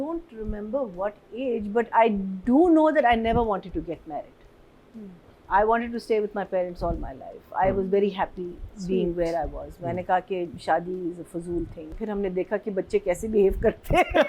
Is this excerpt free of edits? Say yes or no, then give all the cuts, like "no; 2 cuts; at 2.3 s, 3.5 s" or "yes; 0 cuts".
no; 1 cut; at 12.0 s